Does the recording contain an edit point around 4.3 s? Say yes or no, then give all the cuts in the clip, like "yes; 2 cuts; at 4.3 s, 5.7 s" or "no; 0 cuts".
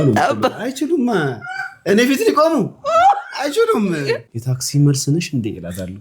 yes; 1 cut; at 4.3 s